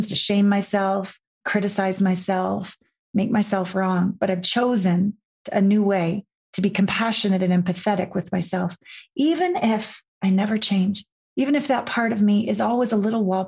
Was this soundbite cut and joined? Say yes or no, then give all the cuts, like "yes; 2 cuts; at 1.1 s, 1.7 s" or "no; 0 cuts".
yes; 1 cut; at 1.4 s